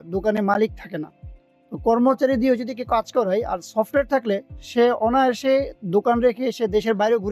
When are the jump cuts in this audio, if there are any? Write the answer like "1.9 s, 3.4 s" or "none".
none